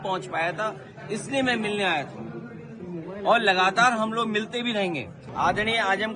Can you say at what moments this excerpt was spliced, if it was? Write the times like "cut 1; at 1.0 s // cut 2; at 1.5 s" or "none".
cut 1; at 5.2 s